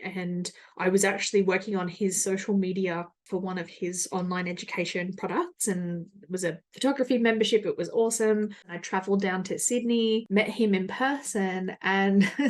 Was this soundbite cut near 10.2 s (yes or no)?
yes